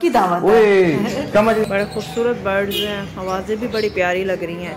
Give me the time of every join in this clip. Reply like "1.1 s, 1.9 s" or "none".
1.7 s

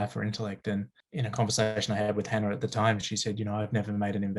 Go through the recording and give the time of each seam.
1.0 s

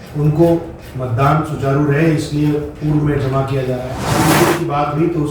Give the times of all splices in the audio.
4.0 s

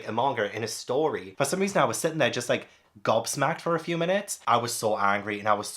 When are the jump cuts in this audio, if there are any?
1.2 s, 4.4 s

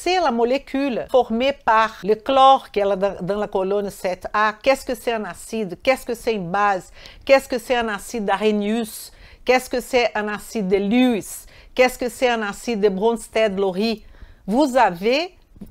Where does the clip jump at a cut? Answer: 1.1 s, 2.0 s

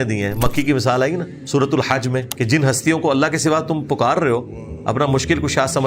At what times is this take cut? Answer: 1.4 s, 2.3 s

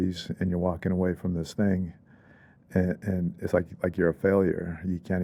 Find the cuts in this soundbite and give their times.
none

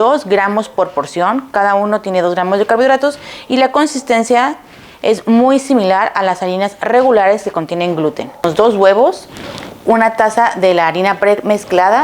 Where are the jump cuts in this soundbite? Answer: 8.4 s

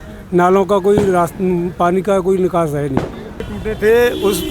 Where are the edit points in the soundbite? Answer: 3.5 s

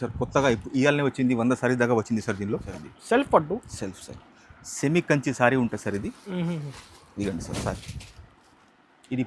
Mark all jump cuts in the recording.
2.7 s

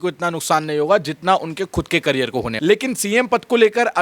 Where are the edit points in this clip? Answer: 2.5 s

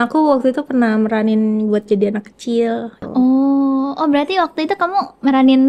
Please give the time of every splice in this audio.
3.0 s

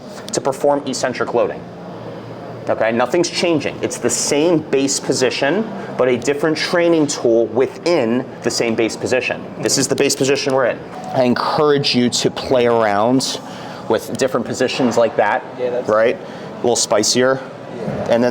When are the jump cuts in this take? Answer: 8.3 s, 10.8 s

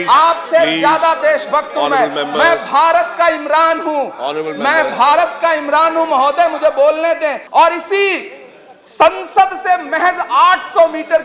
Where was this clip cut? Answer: 7.4 s

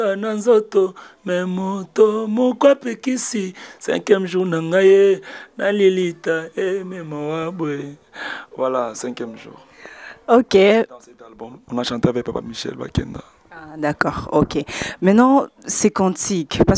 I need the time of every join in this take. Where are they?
none

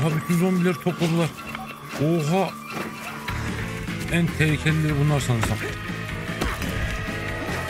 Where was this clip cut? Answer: none

